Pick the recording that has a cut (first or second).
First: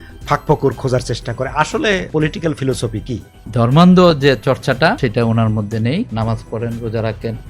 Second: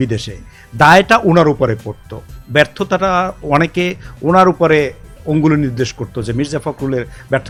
first